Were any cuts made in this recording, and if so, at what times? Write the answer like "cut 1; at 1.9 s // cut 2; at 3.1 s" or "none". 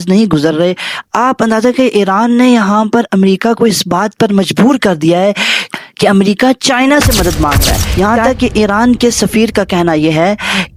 none